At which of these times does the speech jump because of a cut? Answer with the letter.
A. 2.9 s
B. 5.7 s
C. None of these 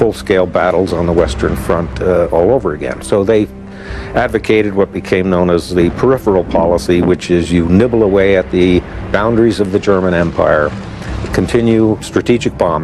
A